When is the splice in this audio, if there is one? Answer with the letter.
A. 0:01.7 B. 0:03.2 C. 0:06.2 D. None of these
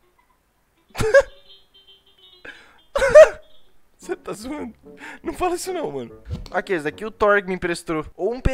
C